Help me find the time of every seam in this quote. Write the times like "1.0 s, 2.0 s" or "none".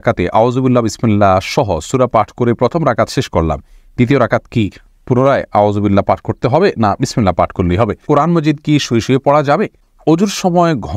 8.0 s, 9.9 s